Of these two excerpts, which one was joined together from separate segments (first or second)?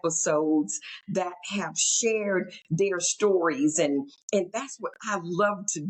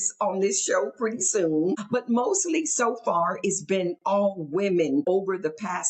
second